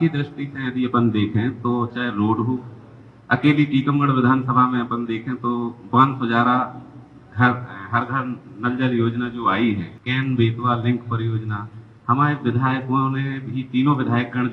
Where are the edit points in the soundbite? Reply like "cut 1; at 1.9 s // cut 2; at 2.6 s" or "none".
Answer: cut 1; at 10.0 s